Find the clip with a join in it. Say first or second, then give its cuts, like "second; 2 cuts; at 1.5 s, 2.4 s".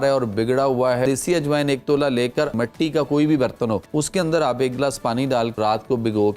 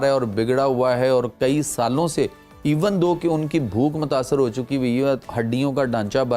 first; 4 cuts; at 1.0 s, 2.5 s, 3.8 s, 5.6 s